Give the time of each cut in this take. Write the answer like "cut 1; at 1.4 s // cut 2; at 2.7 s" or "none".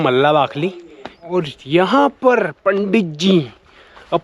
cut 1; at 1.3 s